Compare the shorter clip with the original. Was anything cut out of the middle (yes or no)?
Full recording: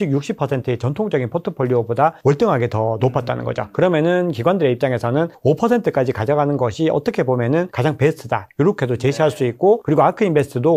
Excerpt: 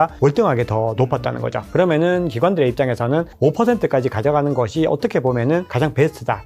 no